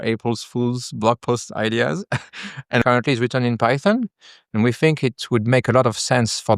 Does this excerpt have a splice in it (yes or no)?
yes